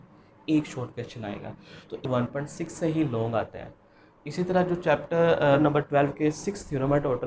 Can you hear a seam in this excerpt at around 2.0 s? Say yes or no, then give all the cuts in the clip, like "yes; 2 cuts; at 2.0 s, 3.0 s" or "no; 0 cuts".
yes; 2 cuts; at 2.0 s, 5.6 s